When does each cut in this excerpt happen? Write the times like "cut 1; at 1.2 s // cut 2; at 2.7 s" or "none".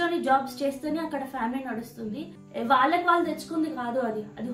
cut 1; at 2.3 s